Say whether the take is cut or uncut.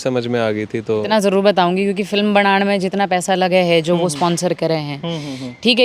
cut